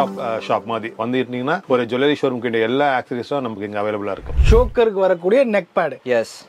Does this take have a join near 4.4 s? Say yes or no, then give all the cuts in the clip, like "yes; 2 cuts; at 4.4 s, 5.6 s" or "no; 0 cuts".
yes; 1 cut; at 4.4 s